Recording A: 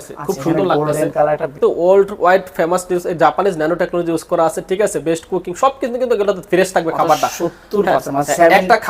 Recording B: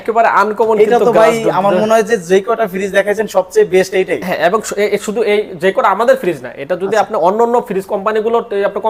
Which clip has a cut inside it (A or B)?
A